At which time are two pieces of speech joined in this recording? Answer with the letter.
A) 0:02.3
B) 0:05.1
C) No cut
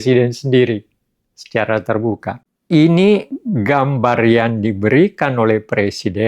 A